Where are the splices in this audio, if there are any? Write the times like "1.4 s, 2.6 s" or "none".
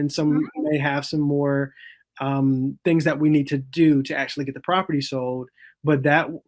none